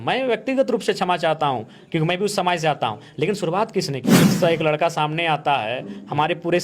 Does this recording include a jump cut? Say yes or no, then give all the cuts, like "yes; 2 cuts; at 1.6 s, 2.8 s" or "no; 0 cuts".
yes; 1 cut; at 4.1 s